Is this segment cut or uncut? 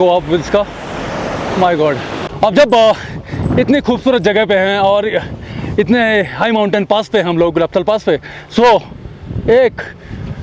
cut